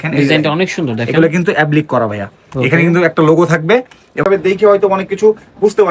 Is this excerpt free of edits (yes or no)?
no